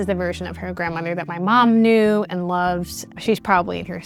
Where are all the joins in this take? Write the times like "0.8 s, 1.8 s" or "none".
none